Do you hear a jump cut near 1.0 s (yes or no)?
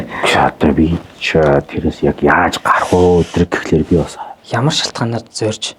no